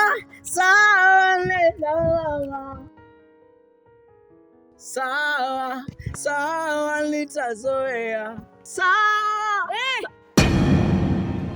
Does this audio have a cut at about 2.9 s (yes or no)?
no